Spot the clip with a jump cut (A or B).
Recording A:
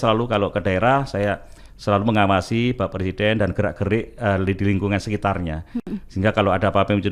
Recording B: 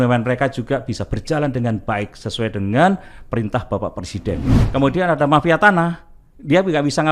B